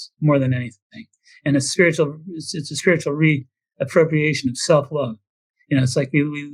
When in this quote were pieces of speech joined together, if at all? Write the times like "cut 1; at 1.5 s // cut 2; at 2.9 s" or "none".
none